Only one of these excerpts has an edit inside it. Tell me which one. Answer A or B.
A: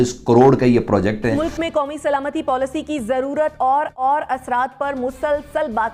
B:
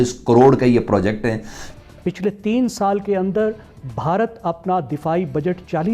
B